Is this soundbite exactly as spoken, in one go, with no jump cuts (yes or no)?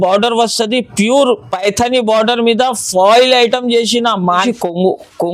no